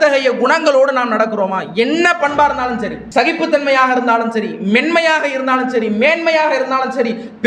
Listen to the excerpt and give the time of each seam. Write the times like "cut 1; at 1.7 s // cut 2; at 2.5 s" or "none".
cut 1; at 3.0 s